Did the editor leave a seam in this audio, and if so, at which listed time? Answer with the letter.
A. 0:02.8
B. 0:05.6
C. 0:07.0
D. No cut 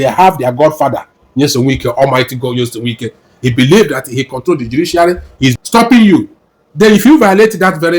B